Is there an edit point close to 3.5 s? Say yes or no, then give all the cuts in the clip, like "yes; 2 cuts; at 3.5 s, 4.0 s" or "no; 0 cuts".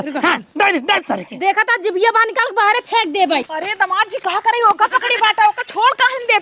yes; 1 cut; at 3.5 s